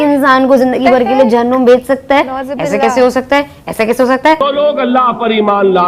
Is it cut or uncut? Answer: cut